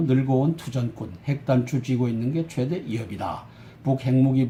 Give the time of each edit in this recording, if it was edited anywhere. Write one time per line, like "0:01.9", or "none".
none